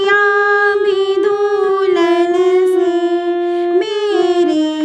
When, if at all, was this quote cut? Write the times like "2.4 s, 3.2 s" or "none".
none